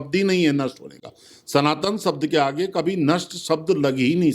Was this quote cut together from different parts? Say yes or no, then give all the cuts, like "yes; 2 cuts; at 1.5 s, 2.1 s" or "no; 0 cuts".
no; 0 cuts